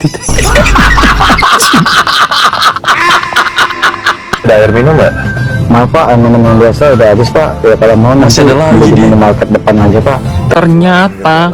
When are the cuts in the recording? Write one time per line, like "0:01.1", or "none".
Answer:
0:04.5
0:10.5